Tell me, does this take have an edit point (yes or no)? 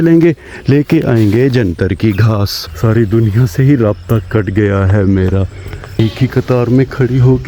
yes